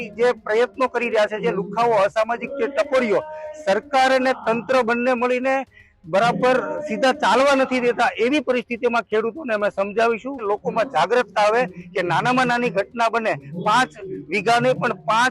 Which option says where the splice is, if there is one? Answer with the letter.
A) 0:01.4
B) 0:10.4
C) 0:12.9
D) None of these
B